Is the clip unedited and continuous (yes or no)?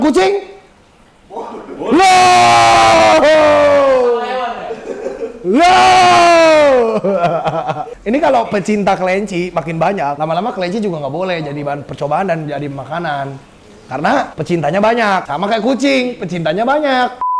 yes